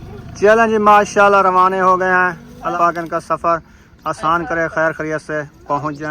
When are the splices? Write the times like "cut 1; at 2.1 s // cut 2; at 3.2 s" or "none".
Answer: cut 1; at 2.7 s